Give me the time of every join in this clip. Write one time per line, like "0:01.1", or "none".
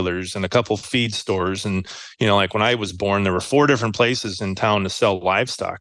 none